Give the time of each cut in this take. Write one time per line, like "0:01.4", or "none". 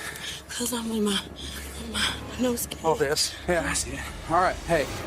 0:03.3